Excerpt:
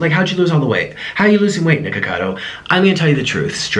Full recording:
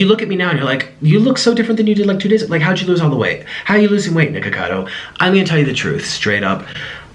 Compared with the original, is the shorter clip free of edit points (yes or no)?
yes